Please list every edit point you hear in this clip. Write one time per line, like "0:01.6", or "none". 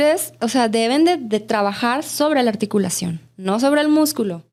none